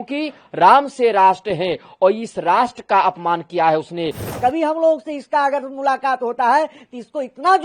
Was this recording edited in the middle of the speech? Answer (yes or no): yes